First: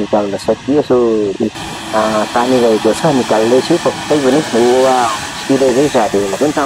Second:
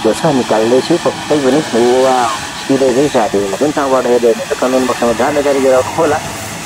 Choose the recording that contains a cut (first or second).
first